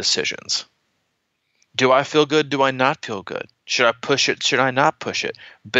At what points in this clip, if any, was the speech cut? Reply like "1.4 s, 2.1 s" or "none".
none